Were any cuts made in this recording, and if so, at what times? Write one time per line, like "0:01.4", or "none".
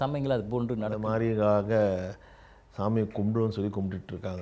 0:01.0